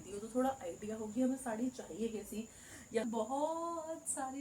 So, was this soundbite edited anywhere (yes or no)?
yes